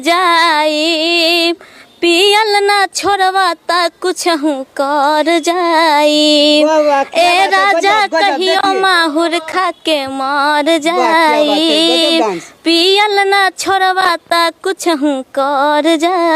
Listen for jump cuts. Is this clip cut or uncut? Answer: uncut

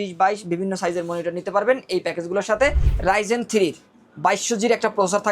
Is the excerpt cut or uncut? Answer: cut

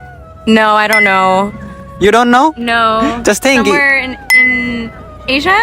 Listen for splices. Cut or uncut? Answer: uncut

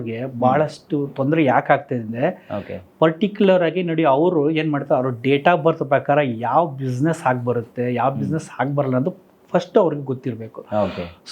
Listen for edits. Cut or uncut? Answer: uncut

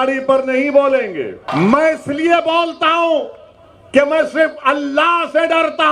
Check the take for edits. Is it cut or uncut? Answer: cut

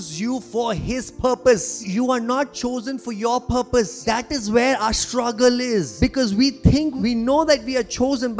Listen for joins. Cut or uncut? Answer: cut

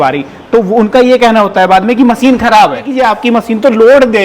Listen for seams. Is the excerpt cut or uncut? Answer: cut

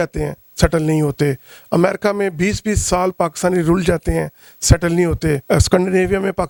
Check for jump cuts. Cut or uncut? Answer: uncut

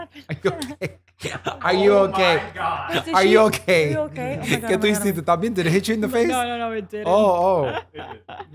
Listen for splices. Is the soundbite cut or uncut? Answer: uncut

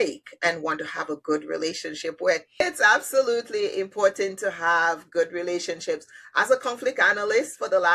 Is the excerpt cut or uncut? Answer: cut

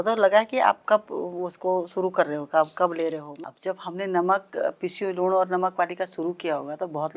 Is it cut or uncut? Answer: cut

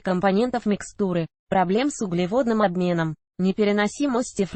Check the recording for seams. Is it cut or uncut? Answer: uncut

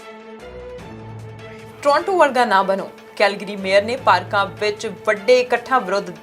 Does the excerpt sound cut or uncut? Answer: cut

